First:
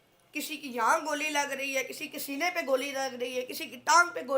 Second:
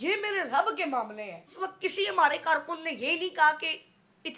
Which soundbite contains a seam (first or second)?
second